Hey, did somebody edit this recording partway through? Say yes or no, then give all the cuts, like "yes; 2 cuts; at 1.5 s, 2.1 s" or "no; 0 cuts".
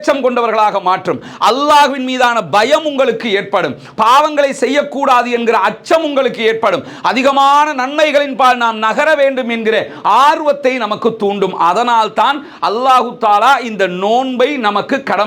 no; 0 cuts